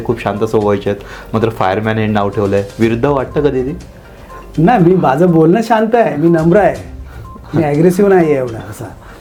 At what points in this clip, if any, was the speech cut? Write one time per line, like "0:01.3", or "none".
none